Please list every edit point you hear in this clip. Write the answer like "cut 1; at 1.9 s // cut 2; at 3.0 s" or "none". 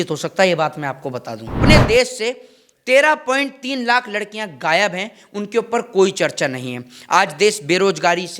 cut 1; at 1.6 s